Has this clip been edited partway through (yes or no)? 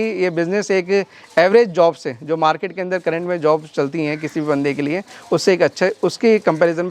no